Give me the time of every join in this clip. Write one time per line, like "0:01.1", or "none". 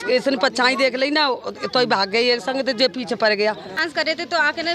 0:03.8